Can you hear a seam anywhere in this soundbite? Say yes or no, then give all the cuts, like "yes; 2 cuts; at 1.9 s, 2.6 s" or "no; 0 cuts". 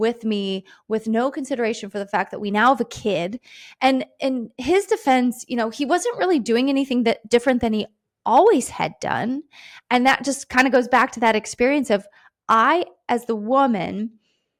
no; 0 cuts